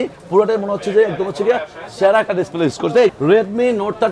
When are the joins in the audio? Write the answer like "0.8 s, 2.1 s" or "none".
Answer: 3.2 s